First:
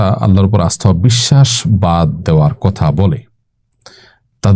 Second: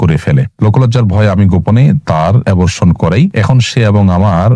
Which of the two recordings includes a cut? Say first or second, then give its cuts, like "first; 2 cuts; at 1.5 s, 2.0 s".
second; 2 cuts; at 2.4 s, 3.3 s